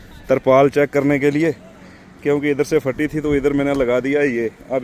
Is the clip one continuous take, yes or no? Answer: yes